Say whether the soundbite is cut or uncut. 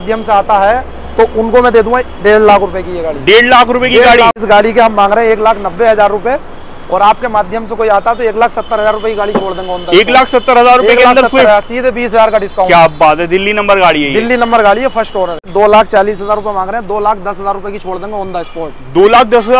cut